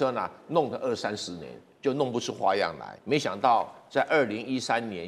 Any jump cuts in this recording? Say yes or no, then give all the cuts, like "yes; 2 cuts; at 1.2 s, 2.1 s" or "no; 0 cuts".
yes; 1 cut; at 2.9 s